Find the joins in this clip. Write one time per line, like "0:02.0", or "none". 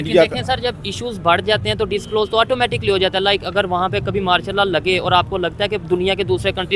none